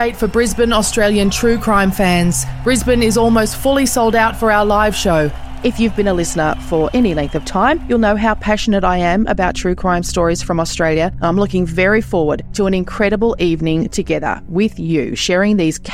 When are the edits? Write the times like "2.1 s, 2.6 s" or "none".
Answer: none